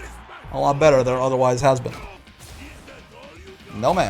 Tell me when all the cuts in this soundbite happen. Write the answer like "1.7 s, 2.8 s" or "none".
2.2 s